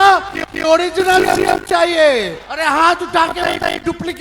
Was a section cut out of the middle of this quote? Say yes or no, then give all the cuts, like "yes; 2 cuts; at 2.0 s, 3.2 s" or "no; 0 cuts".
yes; 1 cut; at 2.4 s